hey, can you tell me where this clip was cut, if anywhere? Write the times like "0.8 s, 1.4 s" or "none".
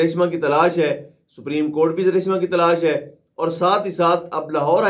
none